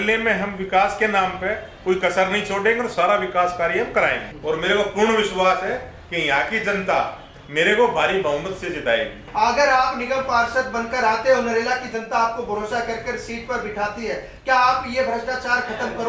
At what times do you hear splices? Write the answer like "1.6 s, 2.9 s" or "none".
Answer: 4.3 s, 7.3 s, 9.2 s